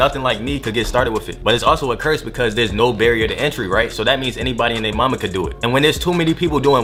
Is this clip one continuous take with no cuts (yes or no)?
yes